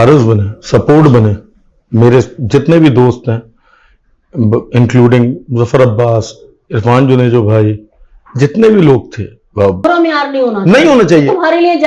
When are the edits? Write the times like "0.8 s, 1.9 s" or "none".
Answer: 9.8 s